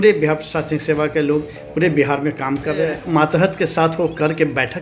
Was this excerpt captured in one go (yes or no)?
no